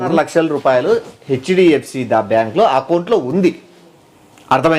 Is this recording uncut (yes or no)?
yes